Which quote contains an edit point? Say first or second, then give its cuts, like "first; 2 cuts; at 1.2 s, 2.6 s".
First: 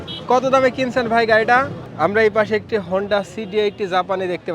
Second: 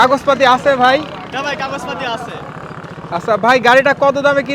first; 1 cut; at 1.8 s